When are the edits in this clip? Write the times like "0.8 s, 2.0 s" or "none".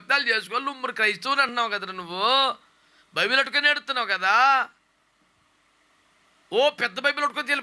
none